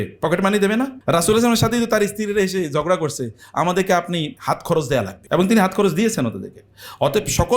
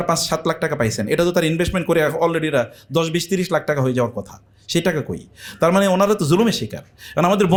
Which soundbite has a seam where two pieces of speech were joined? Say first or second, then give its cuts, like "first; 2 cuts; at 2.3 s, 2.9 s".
first; 3 cuts; at 1.0 s, 4.4 s, 5.2 s